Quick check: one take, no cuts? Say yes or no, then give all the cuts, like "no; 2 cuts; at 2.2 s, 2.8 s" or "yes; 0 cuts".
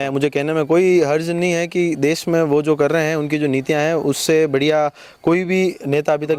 yes; 0 cuts